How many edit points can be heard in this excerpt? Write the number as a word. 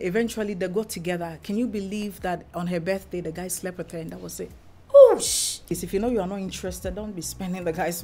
one